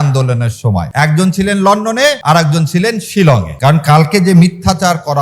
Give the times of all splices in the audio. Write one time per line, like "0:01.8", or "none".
0:00.9
0:02.2
0:03.5